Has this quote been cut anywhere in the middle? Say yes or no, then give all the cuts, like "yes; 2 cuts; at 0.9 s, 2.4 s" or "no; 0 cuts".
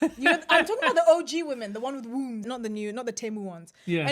yes; 1 cut; at 2.5 s